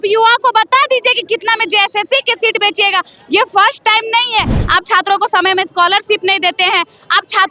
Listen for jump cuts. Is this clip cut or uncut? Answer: cut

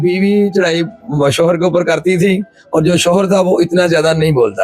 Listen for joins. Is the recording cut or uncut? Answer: uncut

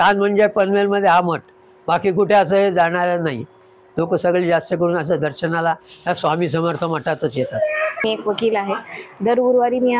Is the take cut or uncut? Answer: cut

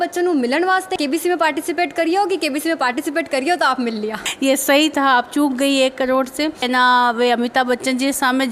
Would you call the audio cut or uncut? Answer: cut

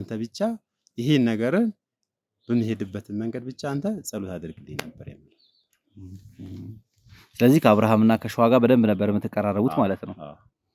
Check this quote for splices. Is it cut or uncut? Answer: uncut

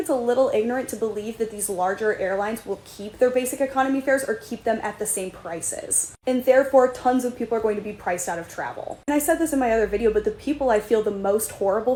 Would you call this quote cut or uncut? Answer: uncut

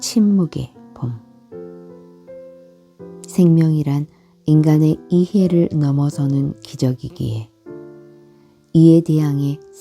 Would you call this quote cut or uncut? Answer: cut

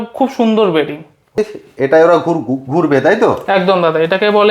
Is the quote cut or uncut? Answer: cut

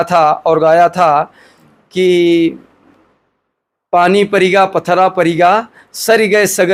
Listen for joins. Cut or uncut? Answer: uncut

